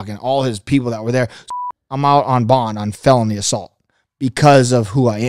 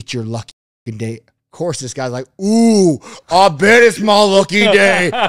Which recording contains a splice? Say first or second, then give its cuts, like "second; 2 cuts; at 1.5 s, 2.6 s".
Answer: first; 1 cut; at 1.4 s